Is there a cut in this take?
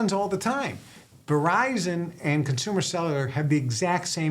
yes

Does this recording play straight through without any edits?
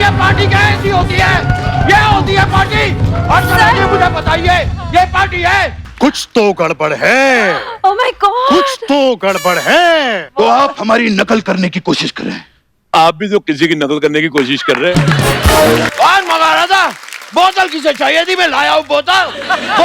no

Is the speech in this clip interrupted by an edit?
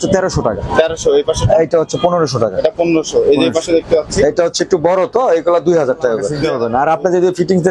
yes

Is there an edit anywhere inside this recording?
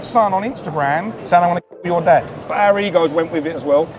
yes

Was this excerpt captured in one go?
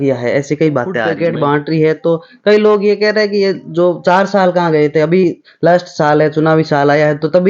no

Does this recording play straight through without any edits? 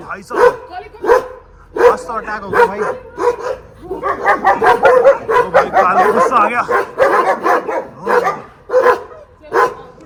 yes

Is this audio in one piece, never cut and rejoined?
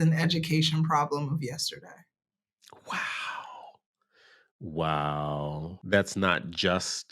no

